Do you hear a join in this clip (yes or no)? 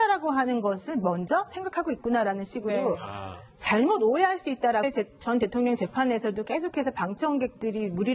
no